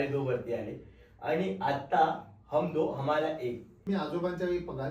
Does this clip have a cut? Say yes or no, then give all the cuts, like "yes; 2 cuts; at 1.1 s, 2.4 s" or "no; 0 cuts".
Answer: yes; 1 cut; at 3.7 s